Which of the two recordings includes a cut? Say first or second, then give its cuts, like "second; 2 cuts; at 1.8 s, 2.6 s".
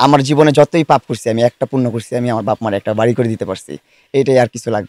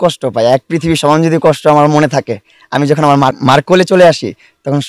second; 1 cut; at 3.3 s